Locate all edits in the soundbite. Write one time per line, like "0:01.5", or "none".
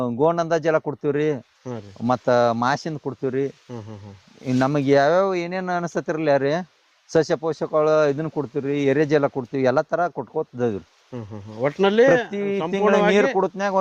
none